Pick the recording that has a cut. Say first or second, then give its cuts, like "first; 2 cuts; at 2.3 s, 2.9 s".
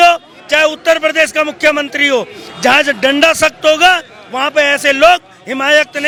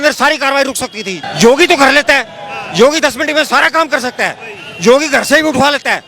second; 1 cut; at 1.1 s